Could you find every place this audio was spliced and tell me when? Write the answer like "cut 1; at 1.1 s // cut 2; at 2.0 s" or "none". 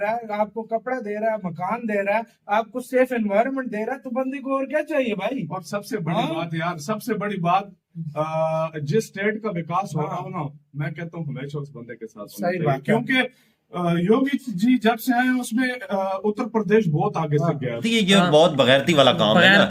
cut 1; at 17.8 s